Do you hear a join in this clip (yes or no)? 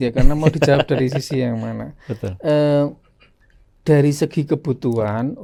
no